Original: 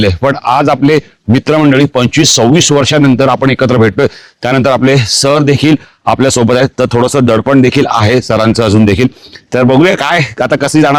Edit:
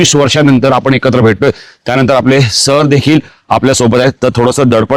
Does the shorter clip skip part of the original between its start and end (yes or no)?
no